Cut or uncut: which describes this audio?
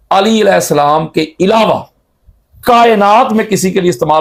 uncut